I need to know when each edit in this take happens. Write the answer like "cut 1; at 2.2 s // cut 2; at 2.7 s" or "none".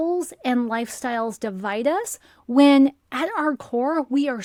none